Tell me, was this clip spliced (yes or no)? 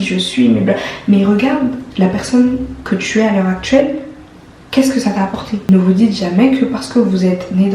yes